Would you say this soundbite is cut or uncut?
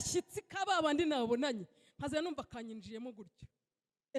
uncut